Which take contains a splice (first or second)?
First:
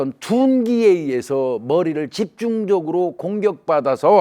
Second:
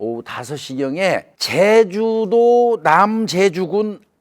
second